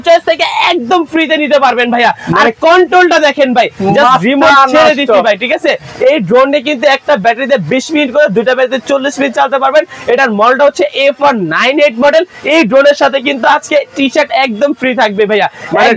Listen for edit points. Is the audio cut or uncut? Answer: uncut